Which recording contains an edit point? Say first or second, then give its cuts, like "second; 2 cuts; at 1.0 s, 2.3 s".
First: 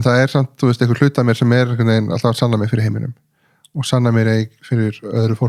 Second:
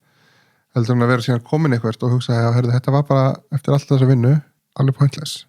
second; 1 cut; at 4.6 s